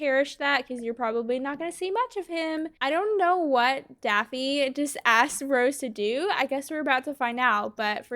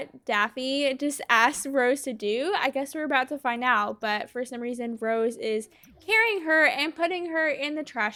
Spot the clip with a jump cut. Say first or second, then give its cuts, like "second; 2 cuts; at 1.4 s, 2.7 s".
first; 1 cut; at 2.7 s